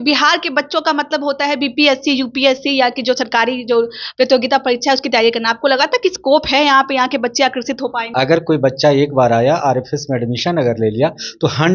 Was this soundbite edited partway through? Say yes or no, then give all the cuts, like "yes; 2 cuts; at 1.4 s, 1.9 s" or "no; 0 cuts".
yes; 1 cut; at 8.0 s